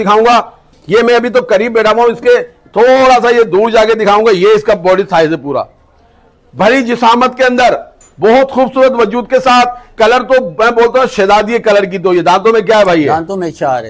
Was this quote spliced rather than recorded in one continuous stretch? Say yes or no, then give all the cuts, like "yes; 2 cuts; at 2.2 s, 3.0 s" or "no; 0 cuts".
no; 0 cuts